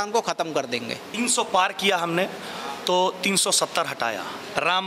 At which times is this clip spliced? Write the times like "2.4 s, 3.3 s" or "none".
1.0 s